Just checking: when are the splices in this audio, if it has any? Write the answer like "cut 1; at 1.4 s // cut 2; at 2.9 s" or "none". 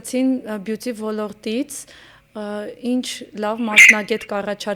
none